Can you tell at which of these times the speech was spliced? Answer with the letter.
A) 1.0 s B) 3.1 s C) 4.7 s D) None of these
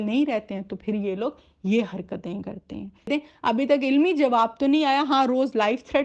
B